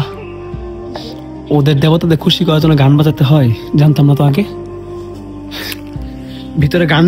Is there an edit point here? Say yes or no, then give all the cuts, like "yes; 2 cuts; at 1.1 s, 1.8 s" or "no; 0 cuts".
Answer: no; 0 cuts